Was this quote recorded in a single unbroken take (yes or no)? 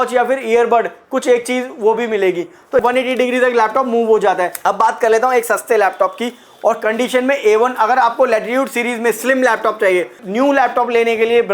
no